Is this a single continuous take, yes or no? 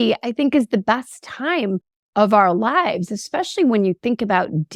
yes